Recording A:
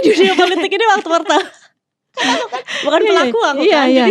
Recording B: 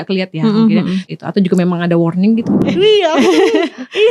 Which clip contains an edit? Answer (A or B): B